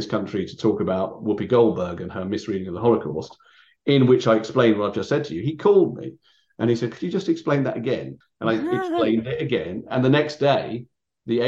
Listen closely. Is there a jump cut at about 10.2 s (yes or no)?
no